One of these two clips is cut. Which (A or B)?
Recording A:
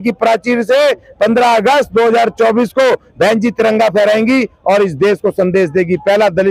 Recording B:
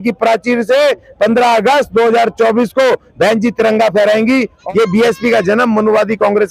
B